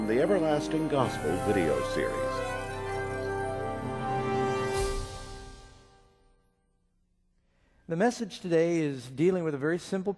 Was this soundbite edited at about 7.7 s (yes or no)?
no